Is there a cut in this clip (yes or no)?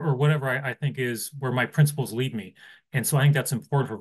no